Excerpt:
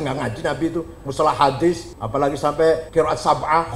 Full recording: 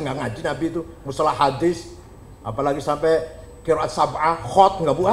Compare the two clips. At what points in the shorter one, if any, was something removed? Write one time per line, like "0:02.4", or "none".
0:01.9
0:02.9